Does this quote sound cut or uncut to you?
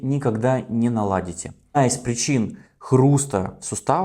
cut